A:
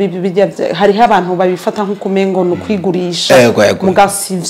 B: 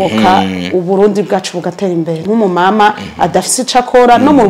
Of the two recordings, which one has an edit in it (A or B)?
B